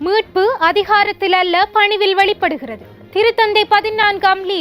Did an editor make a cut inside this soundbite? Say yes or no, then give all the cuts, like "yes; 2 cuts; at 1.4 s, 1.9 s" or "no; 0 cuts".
no; 0 cuts